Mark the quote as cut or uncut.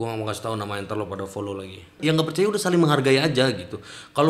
cut